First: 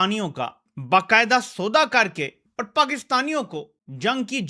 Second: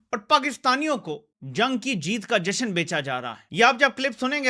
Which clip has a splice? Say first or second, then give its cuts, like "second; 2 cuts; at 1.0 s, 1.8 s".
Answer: second; 1 cut; at 3.4 s